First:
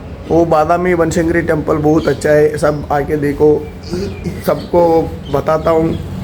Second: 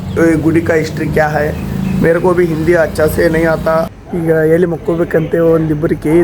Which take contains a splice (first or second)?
second